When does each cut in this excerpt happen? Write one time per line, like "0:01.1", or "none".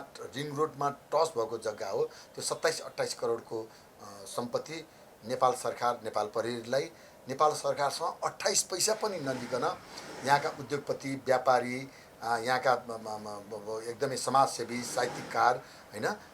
none